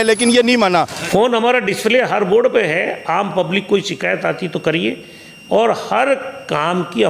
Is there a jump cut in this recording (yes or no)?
yes